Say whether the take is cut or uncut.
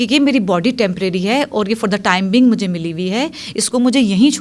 uncut